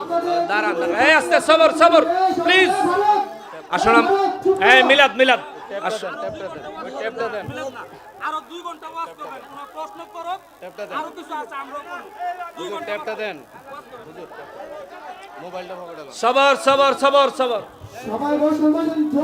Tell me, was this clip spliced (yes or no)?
no